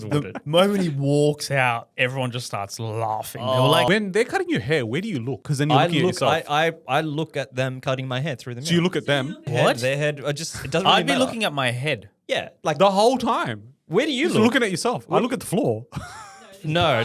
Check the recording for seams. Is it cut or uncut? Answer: cut